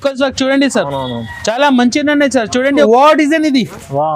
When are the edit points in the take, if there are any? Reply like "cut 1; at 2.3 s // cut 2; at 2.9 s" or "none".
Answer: cut 1; at 2.9 s